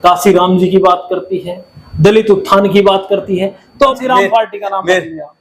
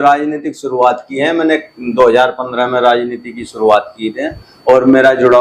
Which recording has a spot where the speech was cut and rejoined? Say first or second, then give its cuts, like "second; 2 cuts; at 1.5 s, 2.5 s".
first; 1 cut; at 3.9 s